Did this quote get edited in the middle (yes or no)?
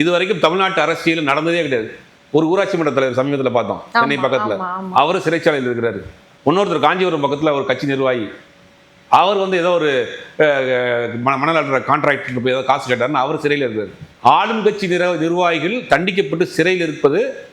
no